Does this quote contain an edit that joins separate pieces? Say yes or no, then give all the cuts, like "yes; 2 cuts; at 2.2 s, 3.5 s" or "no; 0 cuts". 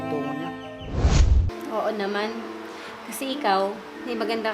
yes; 1 cut; at 1.5 s